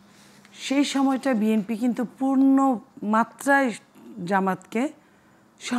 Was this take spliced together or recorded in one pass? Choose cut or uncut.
uncut